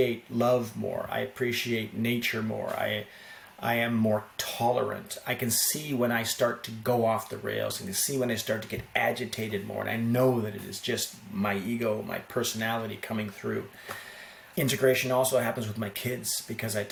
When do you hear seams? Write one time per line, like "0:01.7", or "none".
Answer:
none